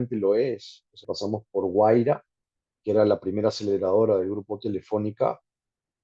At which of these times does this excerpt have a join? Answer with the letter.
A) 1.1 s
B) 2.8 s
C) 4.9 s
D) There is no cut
A